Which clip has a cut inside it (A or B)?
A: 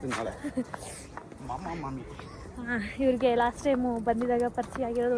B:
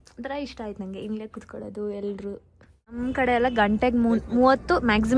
B